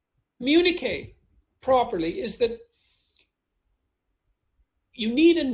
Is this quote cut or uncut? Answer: uncut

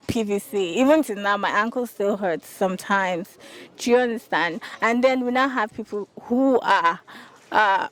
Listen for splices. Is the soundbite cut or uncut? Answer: uncut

